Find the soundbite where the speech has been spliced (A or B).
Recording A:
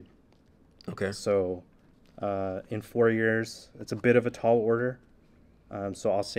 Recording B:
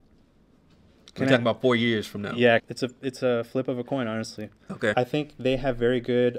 B